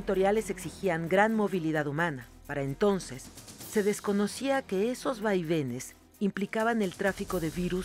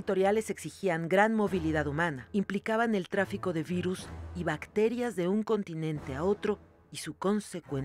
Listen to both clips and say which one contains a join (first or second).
second